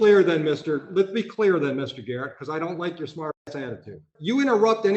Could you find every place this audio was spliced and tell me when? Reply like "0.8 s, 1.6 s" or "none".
4.1 s